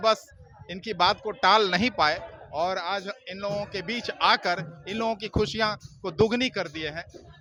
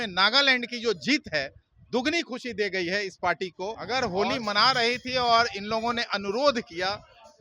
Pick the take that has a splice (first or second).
second